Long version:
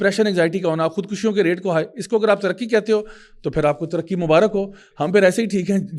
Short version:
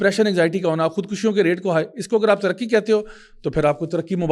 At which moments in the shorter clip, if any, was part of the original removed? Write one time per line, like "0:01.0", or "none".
none